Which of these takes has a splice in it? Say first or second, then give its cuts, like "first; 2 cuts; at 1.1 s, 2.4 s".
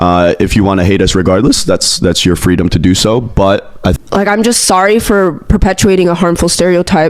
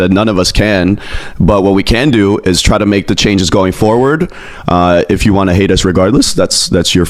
first; 1 cut; at 4.0 s